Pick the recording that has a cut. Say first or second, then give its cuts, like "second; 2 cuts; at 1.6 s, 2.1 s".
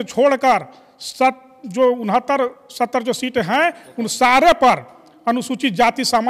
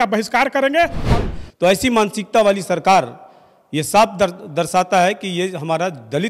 second; 1 cut; at 1.0 s